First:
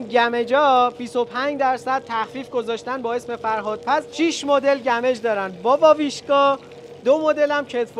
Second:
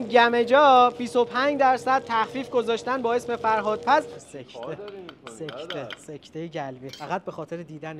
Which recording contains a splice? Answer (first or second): second